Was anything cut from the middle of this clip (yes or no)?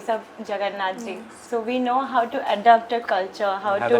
yes